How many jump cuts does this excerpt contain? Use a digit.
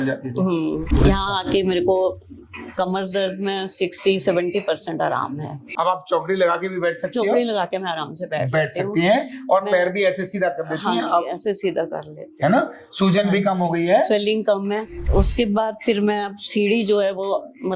3